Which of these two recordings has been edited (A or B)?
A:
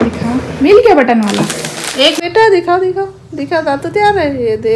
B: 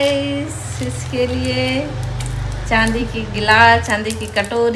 A